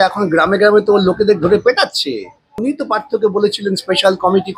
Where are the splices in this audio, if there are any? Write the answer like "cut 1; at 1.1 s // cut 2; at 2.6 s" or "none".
cut 1; at 2.6 s